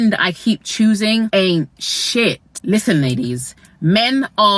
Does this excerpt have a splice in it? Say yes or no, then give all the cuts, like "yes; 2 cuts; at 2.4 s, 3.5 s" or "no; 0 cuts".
yes; 2 cuts; at 1.3 s, 2.5 s